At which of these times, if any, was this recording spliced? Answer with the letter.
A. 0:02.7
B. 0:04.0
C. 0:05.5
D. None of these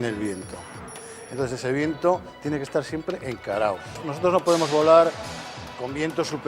B